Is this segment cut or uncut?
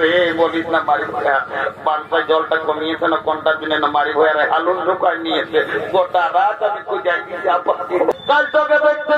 cut